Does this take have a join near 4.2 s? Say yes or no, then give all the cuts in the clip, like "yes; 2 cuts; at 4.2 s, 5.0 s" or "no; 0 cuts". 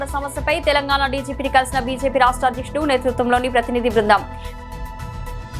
yes; 1 cut; at 4.2 s